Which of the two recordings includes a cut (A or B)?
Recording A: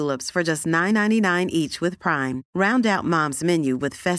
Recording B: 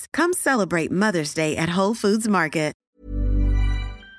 B